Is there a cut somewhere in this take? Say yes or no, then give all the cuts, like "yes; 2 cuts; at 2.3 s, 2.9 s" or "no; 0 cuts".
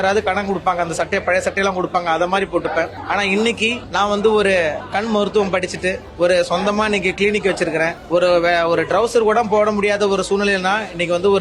yes; 1 cut; at 6.1 s